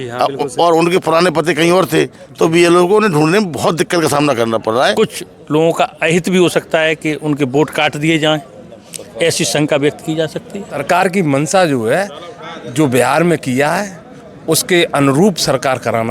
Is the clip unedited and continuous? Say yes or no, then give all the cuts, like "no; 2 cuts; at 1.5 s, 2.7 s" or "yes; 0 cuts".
no; 2 cuts; at 4.9 s, 10.8 s